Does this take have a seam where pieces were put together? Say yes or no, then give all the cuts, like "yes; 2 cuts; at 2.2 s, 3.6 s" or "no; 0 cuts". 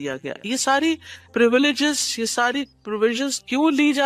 no; 0 cuts